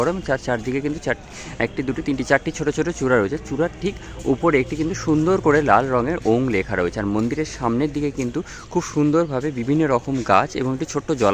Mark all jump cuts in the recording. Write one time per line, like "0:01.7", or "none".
none